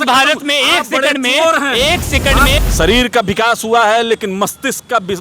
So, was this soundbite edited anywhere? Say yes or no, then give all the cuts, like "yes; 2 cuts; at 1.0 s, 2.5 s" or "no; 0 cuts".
yes; 1 cut; at 2.5 s